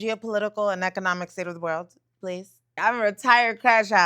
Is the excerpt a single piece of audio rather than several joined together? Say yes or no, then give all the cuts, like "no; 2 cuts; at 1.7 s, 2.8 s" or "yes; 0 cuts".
no; 1 cut; at 2.6 s